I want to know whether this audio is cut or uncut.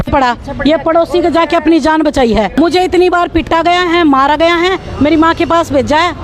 cut